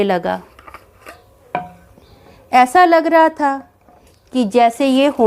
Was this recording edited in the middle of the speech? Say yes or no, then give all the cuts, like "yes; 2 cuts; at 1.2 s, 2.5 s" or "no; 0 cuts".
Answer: no; 0 cuts